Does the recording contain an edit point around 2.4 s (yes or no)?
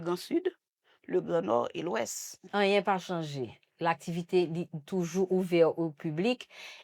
yes